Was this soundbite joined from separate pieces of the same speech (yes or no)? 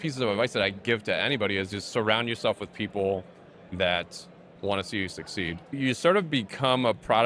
no